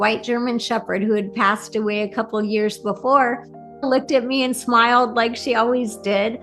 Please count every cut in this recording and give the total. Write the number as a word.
one